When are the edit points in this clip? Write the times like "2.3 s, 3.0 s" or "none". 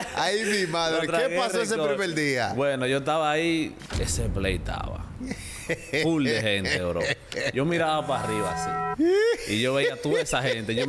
3.8 s